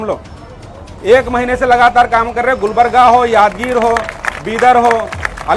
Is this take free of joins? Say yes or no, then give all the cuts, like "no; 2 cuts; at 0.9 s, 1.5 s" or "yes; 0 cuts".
yes; 0 cuts